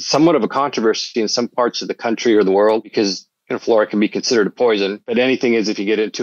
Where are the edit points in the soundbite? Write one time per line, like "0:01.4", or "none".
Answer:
0:02.9
0:05.0